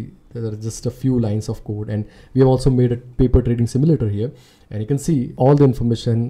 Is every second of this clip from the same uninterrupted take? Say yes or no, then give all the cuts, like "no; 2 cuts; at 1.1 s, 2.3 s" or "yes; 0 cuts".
no; 1 cut; at 5.3 s